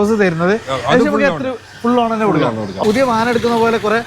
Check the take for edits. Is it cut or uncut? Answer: cut